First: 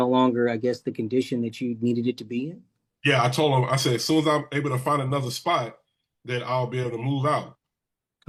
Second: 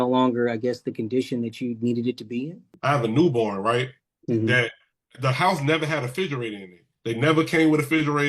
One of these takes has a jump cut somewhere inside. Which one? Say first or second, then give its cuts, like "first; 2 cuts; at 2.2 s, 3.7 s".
second; 1 cut; at 2.6 s